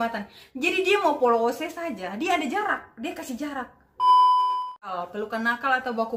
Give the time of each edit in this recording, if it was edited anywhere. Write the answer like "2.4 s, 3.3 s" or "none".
3.8 s, 4.9 s